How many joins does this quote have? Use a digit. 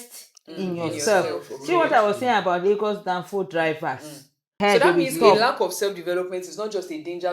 1